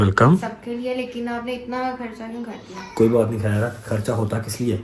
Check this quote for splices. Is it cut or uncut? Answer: uncut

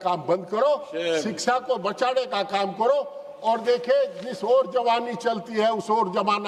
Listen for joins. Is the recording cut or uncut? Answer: uncut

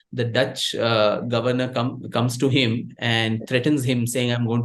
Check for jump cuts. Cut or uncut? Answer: uncut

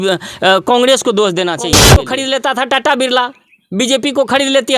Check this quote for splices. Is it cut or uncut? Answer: cut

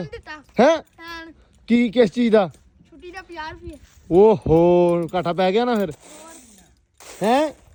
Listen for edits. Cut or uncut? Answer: uncut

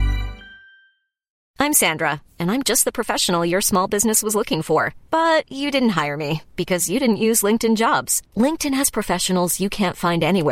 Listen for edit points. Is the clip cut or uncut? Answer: cut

